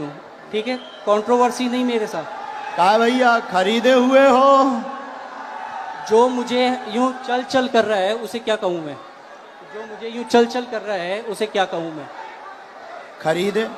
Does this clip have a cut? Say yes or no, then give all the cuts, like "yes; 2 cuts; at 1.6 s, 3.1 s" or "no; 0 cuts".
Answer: no; 0 cuts